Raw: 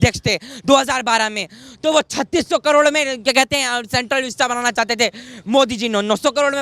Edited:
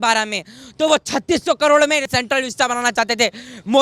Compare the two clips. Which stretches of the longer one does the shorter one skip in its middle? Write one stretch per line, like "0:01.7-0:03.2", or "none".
0:03.1-0:03.9